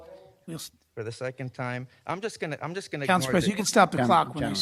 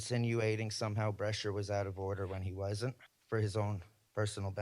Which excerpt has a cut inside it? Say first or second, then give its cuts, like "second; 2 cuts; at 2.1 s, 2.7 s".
second; 1 cut; at 3.1 s